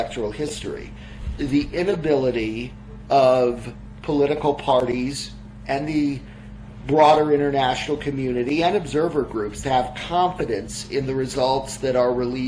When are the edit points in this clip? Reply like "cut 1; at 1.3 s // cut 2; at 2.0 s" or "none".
none